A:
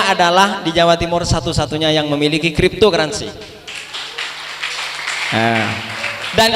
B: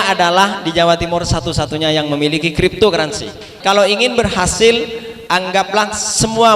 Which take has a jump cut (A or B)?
B